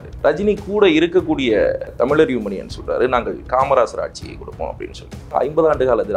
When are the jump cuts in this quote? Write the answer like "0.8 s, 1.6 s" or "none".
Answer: 1.9 s, 5.3 s